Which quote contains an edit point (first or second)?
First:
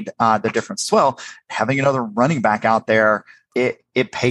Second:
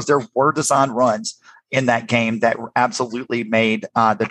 first